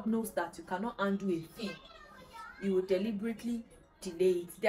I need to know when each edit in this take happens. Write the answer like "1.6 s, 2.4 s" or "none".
none